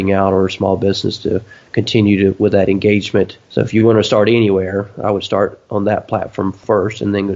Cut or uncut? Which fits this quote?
cut